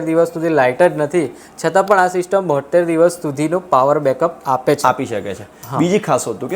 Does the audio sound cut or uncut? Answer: uncut